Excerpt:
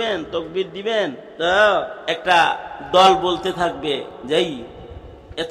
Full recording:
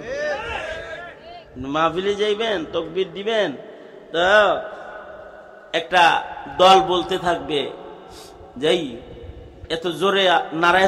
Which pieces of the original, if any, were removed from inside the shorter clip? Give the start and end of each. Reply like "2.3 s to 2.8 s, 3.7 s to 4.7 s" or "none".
3.7 s to 4.0 s, 4.7 s to 5.6 s, 7.8 s to 8.5 s